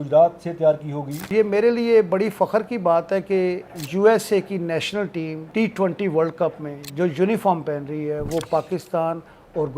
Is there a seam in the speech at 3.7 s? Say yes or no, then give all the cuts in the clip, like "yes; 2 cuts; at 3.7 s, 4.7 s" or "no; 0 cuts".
yes; 3 cuts; at 1.3 s, 3.7 s, 5.4 s